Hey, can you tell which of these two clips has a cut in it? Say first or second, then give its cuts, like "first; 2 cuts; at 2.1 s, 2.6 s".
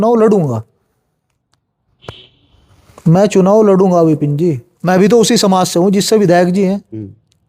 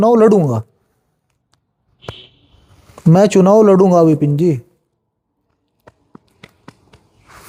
first; 1 cut; at 4.7 s